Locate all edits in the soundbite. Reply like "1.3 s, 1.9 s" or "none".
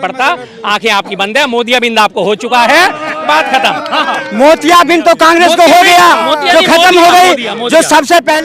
none